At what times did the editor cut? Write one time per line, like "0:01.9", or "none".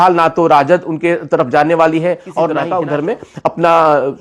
0:02.6

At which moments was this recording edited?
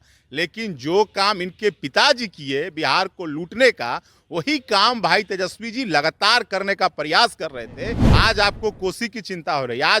0:08.0

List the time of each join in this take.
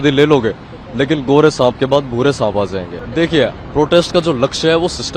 0:03.0

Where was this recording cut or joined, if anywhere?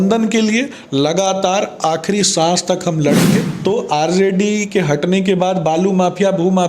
0:03.5

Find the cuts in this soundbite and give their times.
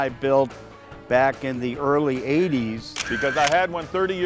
0:03.0

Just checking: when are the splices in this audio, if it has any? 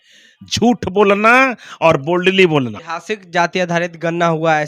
0:02.9

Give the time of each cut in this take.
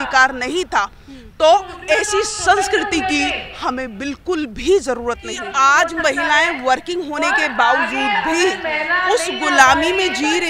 0:05.4

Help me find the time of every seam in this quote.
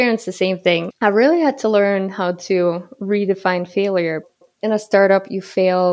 0:01.0
0:04.4

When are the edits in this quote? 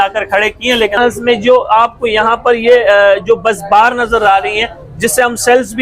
0:00.9

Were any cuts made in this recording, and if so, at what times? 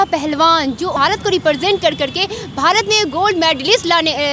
0:00.9

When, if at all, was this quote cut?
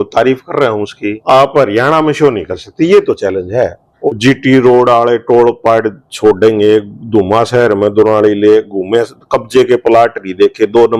0:01.1
0:03.9

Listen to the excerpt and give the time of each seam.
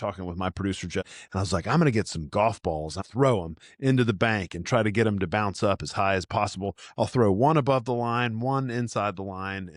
0:01.1
0:03.0

